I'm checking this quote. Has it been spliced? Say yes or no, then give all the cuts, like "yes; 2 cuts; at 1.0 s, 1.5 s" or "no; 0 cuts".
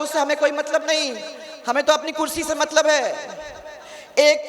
no; 0 cuts